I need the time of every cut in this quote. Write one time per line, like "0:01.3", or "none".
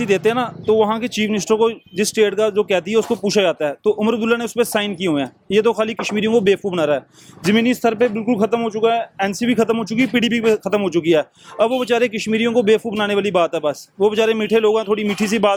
none